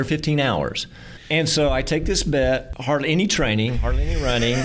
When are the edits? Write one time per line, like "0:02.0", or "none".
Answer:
0:01.1
0:02.7